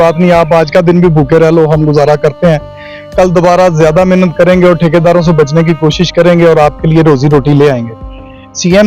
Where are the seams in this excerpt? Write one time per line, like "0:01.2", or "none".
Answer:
none